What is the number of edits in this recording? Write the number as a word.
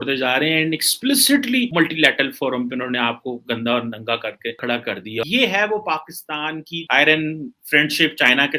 one